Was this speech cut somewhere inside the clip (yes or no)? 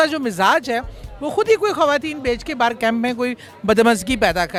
no